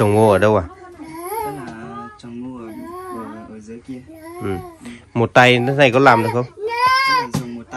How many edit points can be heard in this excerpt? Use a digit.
0